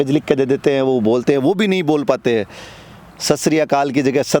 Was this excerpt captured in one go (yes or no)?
yes